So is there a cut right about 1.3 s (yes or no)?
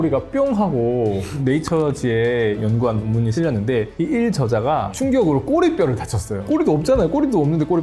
yes